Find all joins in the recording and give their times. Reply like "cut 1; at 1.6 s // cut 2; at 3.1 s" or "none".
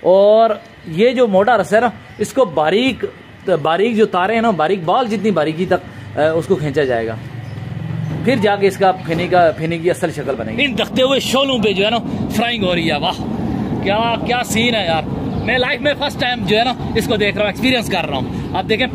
cut 1; at 10.5 s